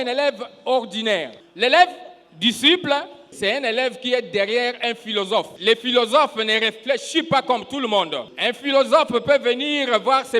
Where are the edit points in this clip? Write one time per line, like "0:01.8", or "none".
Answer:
0:01.4
0:03.3
0:05.5
0:08.2